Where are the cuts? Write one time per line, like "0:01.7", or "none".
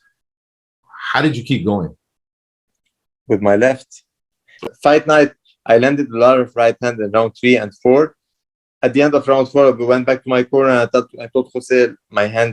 0:04.5